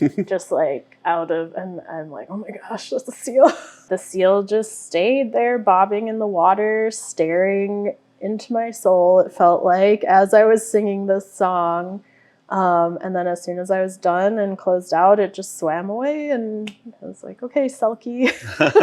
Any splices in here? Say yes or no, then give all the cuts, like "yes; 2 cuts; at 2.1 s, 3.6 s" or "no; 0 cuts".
yes; 1 cut; at 3.8 s